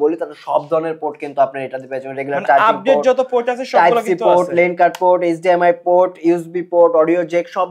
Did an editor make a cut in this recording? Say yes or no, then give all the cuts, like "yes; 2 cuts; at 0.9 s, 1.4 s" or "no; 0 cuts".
no; 0 cuts